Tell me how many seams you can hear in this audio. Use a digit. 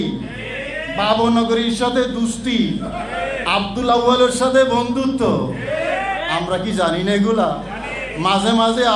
2